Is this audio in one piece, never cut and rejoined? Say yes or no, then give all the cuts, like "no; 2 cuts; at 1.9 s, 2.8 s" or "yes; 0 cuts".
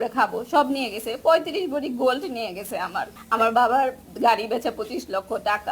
no; 1 cut; at 3.2 s